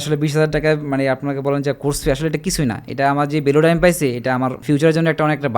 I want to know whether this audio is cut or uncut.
cut